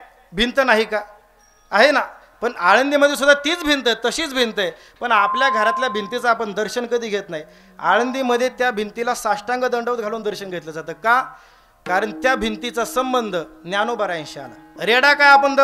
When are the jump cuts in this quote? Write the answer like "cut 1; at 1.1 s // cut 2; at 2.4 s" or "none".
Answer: cut 1; at 14.7 s